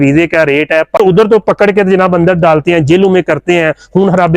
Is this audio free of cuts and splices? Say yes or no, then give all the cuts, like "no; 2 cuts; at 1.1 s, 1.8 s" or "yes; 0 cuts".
no; 1 cut; at 1.0 s